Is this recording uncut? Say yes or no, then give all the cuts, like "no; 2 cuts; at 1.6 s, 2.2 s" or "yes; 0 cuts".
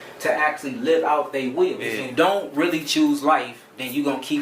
no; 1 cut; at 1.8 s